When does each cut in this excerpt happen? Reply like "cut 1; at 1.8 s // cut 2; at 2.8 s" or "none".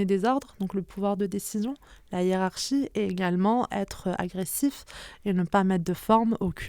cut 1; at 3.7 s